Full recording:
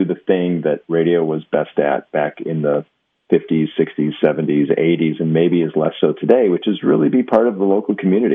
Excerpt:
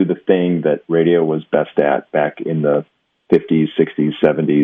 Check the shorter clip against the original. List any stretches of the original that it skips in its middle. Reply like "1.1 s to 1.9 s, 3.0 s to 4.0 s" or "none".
none

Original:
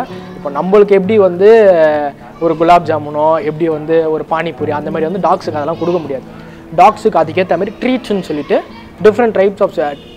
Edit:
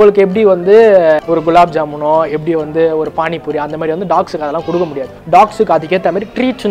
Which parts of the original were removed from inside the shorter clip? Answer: 1.9 s to 2.3 s, 6.2 s to 6.5 s

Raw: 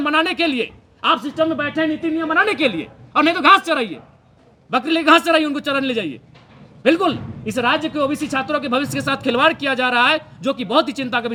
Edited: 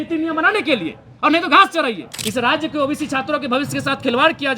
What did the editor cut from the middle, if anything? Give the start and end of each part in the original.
4.1 s to 7.3 s

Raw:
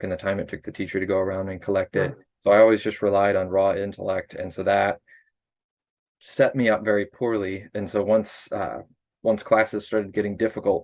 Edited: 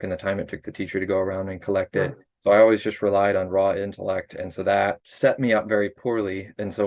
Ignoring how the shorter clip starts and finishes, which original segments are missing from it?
5.1 s to 6.2 s

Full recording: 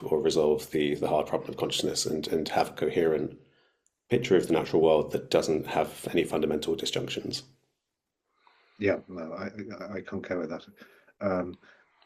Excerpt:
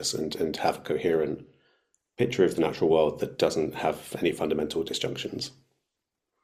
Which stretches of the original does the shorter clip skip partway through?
none

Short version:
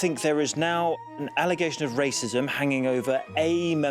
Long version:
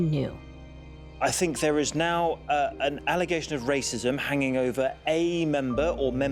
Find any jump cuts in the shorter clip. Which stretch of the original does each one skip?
2.5 s to 2.8 s

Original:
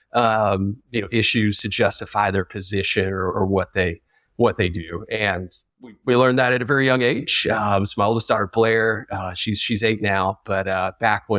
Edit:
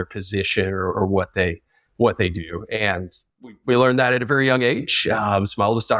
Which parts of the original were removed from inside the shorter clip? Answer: none

